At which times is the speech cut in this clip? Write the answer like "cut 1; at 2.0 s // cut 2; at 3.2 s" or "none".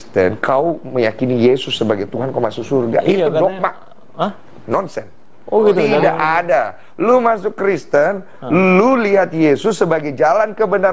cut 1; at 4.3 s // cut 2; at 5.7 s